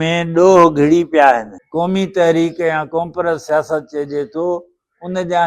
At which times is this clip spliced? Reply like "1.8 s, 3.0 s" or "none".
1.6 s